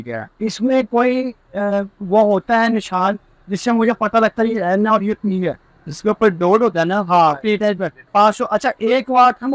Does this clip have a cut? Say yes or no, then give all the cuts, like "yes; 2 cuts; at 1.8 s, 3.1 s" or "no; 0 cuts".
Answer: yes; 1 cut; at 8.0 s